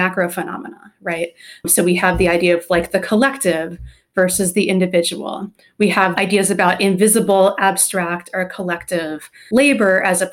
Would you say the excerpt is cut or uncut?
cut